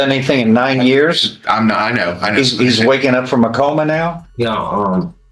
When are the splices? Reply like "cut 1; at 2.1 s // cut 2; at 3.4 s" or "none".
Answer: cut 1; at 4.2 s

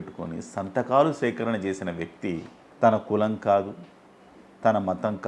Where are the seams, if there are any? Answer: cut 1; at 2.6 s

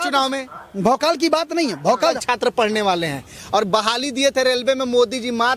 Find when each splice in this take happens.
cut 1; at 2.2 s

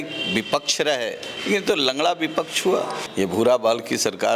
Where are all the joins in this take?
cut 1; at 1.3 s // cut 2; at 3.0 s

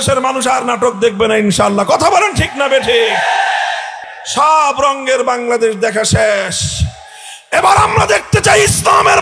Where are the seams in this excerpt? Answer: cut 1; at 3.9 s

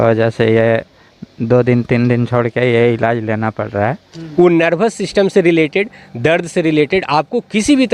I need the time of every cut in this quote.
cut 1; at 4.2 s

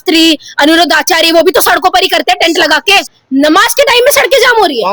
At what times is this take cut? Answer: cut 1; at 3.1 s

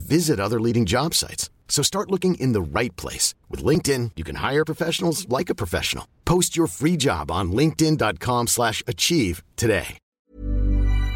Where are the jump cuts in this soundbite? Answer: cut 1; at 10.1 s

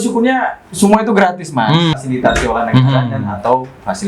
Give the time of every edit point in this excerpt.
cut 1; at 2.0 s

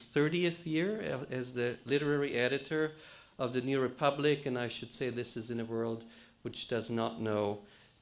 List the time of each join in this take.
cut 1; at 5.3 s

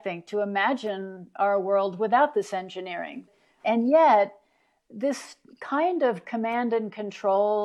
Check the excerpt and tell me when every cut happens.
cut 1; at 3.5 s

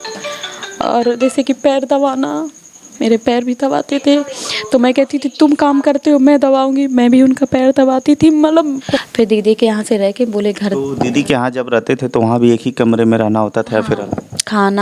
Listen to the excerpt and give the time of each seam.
cut 1; at 9.0 s

